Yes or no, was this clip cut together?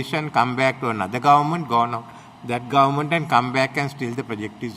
no